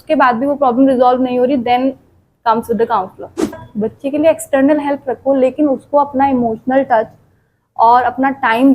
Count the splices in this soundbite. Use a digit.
1